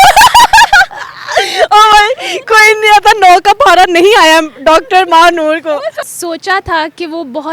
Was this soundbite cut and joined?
yes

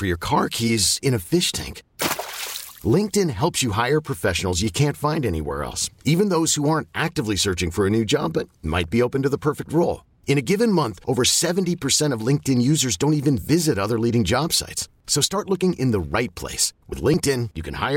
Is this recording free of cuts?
yes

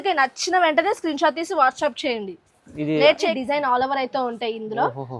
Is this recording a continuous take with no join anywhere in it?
no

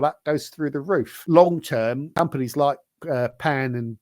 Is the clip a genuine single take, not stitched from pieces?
no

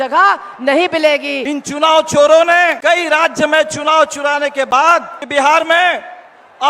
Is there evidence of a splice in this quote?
yes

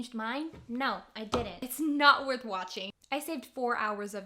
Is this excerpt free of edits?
no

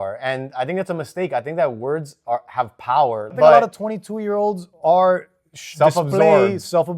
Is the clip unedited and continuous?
no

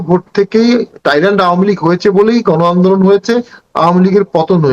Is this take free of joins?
no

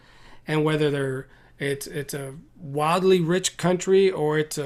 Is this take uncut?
yes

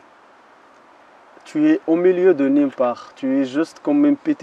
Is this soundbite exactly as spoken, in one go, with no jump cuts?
yes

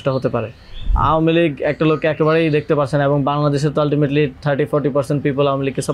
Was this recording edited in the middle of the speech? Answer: yes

